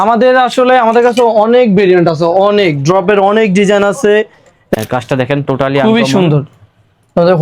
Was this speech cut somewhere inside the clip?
yes; 1 cut; at 4.8 s

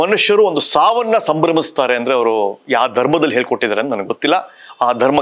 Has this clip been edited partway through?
no; 0 cuts

